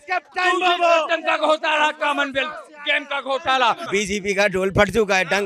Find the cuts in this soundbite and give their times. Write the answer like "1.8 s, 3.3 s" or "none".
3.8 s